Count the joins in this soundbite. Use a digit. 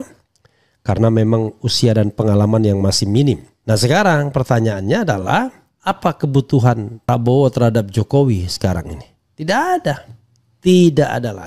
3